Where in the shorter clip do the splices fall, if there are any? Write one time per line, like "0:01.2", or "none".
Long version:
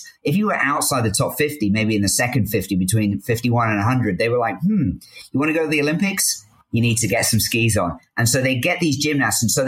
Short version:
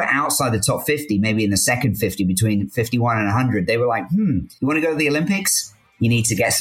0:04.5